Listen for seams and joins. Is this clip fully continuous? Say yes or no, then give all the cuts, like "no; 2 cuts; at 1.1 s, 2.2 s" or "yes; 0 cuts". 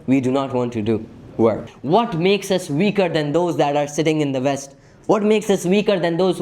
no; 1 cut; at 1.7 s